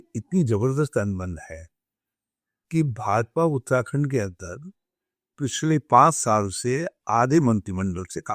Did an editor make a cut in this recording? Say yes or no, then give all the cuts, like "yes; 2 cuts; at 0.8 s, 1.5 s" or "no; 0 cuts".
no; 0 cuts